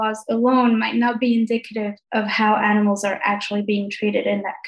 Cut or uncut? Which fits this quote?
uncut